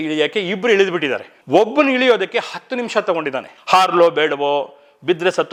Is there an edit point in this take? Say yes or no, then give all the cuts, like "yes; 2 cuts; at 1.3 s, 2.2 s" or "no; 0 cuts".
no; 0 cuts